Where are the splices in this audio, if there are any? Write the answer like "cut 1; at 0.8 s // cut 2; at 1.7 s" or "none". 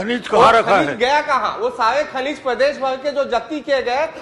none